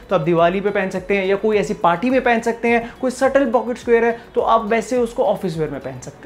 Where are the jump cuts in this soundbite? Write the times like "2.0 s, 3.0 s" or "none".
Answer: none